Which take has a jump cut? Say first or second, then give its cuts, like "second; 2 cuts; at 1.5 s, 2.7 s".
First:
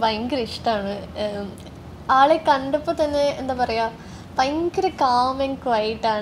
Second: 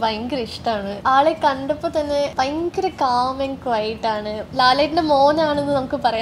second; 3 cuts; at 0.9 s, 2.3 s, 4.4 s